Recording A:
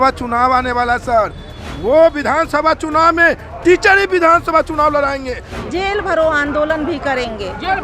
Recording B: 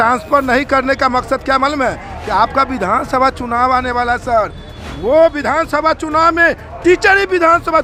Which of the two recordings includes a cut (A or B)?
A